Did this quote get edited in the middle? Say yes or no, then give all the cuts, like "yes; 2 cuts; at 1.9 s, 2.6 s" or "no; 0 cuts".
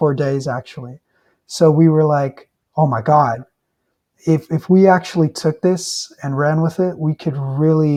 no; 0 cuts